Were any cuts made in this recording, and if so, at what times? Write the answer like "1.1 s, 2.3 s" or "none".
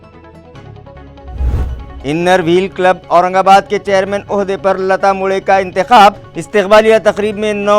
1.8 s